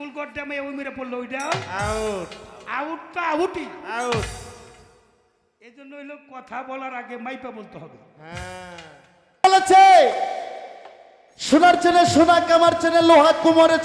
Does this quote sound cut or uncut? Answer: cut